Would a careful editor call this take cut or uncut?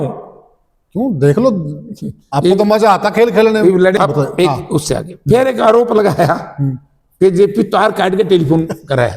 cut